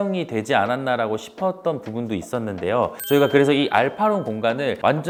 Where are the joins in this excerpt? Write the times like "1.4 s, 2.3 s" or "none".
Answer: none